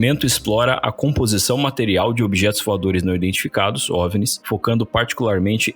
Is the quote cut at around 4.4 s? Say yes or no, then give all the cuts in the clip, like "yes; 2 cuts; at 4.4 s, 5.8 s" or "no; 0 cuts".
yes; 1 cut; at 4.4 s